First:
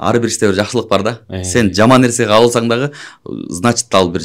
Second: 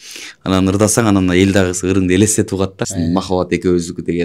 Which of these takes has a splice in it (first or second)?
second